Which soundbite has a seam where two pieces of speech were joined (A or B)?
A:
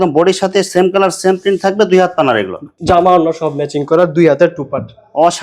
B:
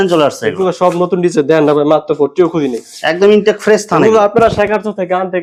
A